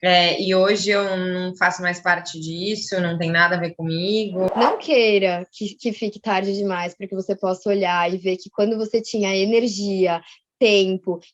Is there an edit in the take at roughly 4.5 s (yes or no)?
yes